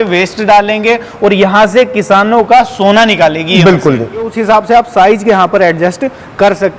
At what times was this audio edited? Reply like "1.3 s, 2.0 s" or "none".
4.3 s